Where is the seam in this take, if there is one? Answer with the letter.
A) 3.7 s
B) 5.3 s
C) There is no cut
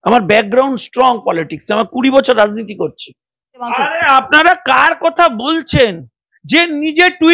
A